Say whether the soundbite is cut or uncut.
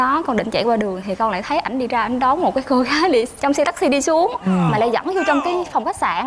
uncut